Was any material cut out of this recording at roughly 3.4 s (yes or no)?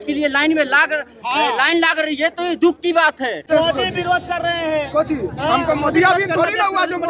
yes